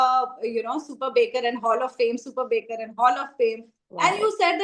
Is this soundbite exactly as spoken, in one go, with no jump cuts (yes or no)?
yes